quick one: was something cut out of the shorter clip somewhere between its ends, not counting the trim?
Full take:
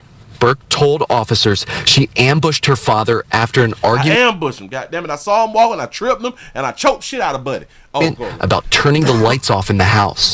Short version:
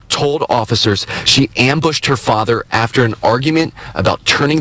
yes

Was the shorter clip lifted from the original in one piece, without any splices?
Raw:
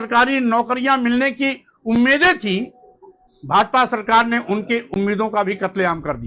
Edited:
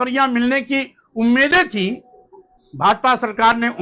yes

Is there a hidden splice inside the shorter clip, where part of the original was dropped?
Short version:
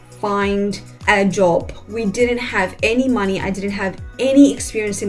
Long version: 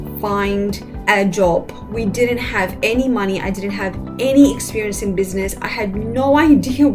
no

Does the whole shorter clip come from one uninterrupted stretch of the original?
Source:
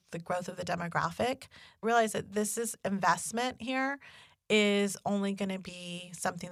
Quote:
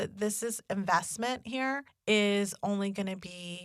no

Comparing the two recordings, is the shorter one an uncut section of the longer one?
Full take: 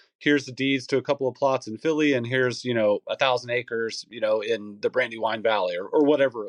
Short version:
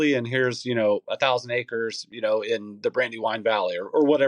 yes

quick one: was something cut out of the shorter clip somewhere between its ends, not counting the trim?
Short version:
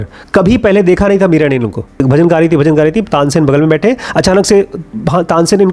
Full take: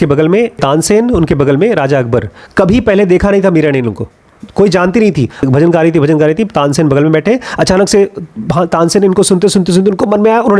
yes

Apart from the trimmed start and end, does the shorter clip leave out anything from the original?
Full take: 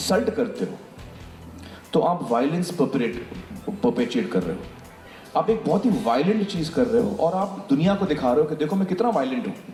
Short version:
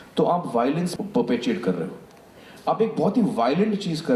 yes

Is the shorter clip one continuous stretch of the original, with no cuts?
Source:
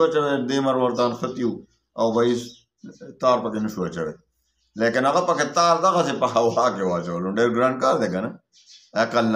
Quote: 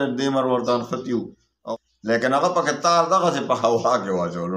no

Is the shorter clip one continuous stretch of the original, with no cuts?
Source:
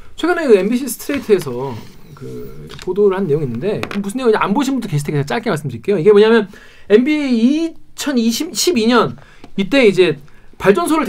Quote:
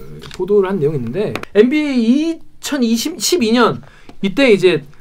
no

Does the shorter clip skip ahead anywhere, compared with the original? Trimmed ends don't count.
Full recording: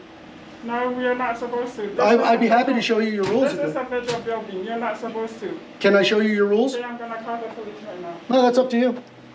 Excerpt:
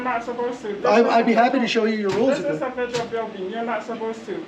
no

